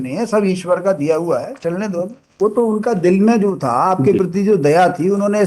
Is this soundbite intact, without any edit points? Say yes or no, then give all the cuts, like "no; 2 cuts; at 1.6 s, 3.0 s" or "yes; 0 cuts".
no; 1 cut; at 2.3 s